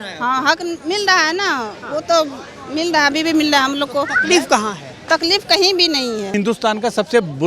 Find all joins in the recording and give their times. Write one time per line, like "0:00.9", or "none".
0:06.3